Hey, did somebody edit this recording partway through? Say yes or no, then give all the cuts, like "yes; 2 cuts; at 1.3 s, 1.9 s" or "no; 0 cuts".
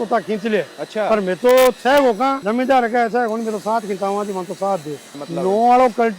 yes; 2 cuts; at 2.4 s, 5.2 s